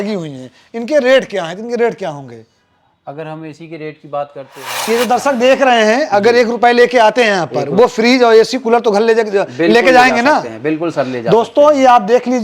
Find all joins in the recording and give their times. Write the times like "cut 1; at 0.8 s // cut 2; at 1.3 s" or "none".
cut 1; at 4.8 s

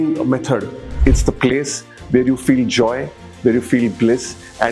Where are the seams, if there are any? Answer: cut 1; at 0.9 s

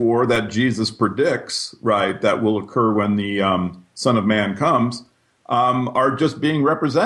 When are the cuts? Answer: none

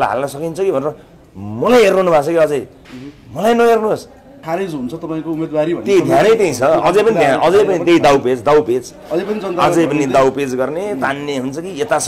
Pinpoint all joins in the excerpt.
cut 1; at 4.4 s

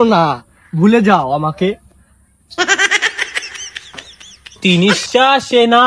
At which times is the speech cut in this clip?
cut 1; at 4.6 s

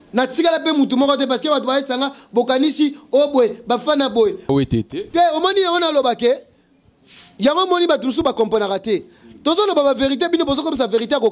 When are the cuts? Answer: cut 1; at 4.5 s

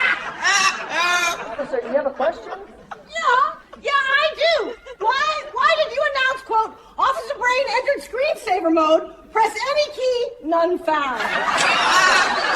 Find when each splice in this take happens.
none

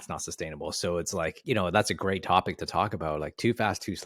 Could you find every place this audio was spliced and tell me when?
cut 1; at 1.4 s

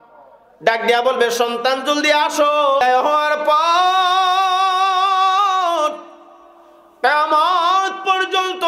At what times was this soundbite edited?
cut 1; at 2.8 s

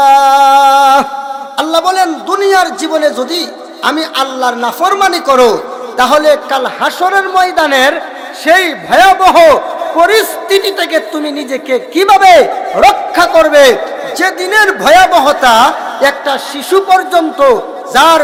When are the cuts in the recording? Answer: none

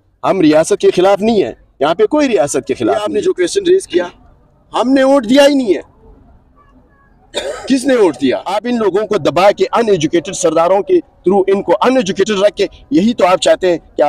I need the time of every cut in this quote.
cut 1; at 3.0 s // cut 2; at 8.5 s

